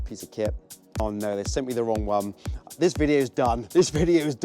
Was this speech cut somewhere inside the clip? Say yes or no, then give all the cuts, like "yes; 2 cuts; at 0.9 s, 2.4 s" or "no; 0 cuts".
yes; 1 cut; at 1.0 s